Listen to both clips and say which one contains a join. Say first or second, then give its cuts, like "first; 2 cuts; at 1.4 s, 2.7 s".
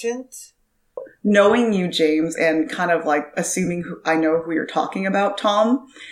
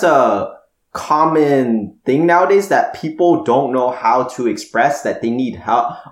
first; 1 cut; at 1.1 s